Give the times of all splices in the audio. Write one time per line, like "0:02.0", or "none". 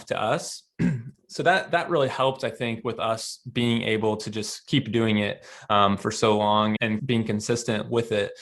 0:01.1